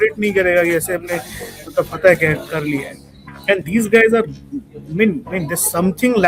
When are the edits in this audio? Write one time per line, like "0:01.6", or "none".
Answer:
none